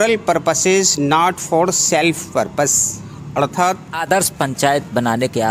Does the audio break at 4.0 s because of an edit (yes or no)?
yes